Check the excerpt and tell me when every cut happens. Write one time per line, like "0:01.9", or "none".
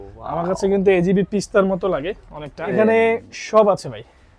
0:02.7